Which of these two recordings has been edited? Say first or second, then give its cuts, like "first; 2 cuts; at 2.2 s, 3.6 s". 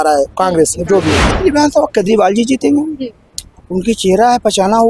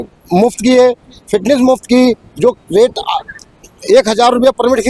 first; 1 cut; at 1.2 s